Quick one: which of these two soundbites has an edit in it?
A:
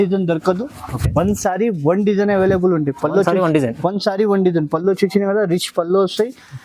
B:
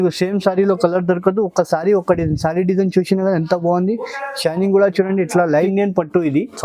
B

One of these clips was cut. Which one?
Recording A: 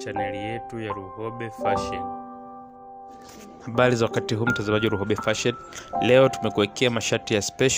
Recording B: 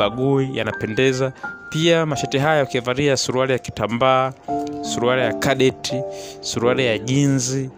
A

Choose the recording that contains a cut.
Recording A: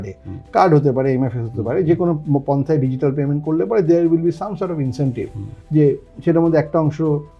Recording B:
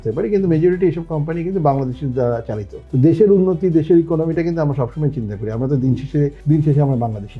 B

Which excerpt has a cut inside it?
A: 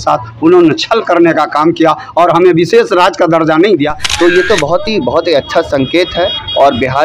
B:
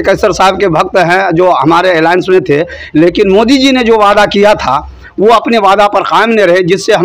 A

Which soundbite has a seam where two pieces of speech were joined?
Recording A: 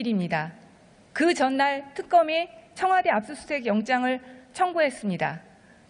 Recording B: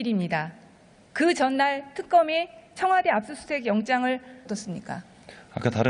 A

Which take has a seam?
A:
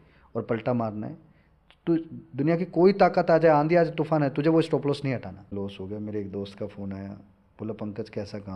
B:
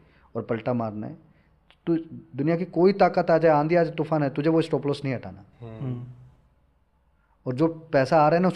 A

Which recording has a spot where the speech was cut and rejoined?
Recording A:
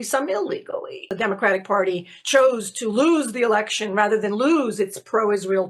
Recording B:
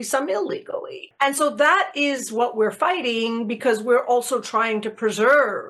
A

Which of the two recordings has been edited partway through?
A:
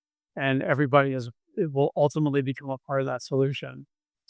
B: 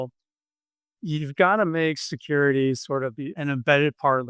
B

